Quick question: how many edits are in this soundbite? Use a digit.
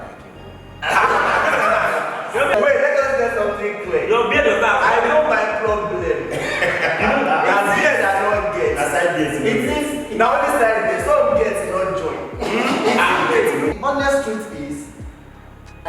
2